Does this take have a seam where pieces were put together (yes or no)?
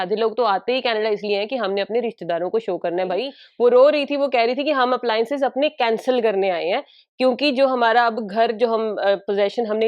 yes